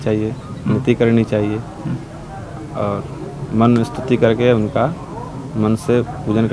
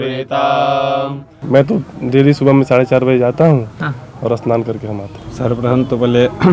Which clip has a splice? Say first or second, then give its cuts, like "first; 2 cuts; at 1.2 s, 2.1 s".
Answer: second; 2 cuts; at 1.3 s, 5.2 s